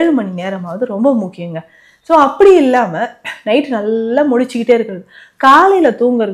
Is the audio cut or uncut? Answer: uncut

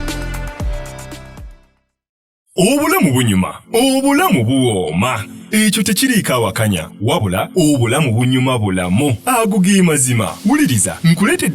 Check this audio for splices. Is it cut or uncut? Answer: cut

